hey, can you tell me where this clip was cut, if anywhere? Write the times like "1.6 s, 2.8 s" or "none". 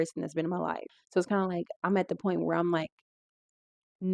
1.0 s